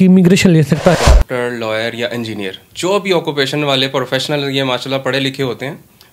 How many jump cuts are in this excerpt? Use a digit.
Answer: 1